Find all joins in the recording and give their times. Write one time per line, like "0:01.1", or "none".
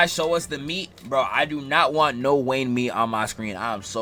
none